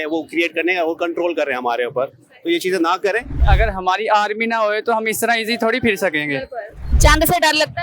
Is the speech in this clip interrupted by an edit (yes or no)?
yes